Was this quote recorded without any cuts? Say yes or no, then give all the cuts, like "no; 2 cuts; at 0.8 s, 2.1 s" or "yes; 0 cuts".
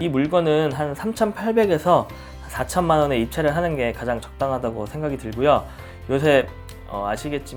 yes; 0 cuts